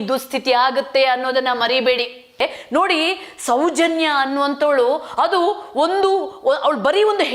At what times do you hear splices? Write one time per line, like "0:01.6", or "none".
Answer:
0:02.4